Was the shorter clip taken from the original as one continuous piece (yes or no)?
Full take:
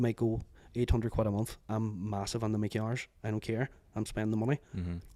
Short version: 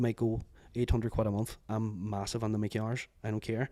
yes